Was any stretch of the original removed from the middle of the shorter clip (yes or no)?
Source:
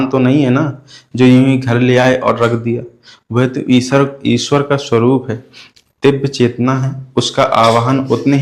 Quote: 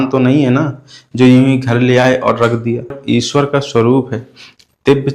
yes